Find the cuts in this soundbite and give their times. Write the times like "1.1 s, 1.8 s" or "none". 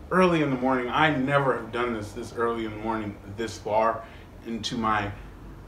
none